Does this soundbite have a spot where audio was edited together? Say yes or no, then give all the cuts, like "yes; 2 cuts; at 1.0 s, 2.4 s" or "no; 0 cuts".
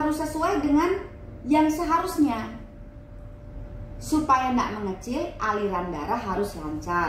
no; 0 cuts